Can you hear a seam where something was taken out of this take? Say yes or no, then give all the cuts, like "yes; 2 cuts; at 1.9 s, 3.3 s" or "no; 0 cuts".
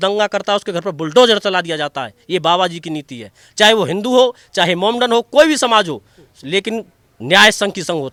no; 0 cuts